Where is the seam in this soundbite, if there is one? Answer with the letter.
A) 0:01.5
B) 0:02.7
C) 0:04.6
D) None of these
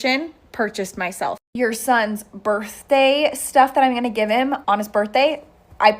C